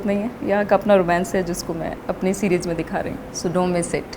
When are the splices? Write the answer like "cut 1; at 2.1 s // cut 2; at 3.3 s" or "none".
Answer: cut 1; at 2.0 s // cut 2; at 3.2 s